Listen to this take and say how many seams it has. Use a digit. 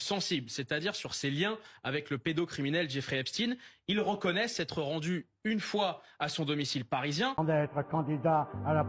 1